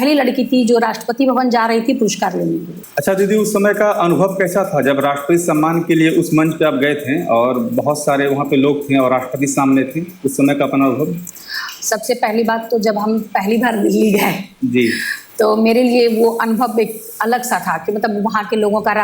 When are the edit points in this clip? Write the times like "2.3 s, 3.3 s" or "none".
none